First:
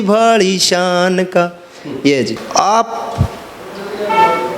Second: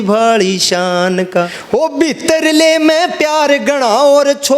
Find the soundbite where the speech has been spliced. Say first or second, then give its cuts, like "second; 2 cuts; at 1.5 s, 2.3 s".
second; 1 cut; at 1.6 s